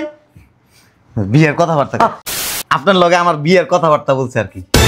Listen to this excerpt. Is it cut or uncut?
cut